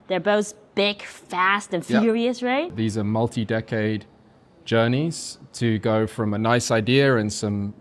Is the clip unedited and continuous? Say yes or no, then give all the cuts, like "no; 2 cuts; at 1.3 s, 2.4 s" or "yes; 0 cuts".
no; 1 cut; at 2.7 s